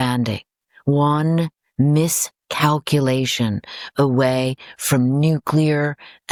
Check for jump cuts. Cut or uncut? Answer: uncut